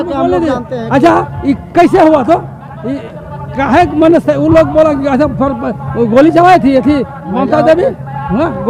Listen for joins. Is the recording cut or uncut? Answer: uncut